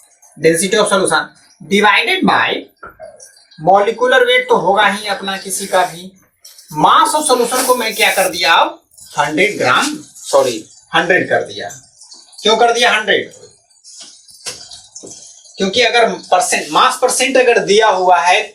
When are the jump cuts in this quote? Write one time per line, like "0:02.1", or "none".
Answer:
none